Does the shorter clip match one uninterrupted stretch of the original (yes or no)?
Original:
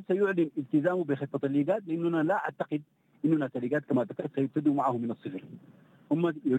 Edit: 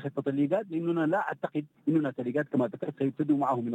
no